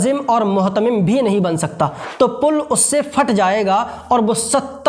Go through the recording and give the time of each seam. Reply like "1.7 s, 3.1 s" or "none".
2.0 s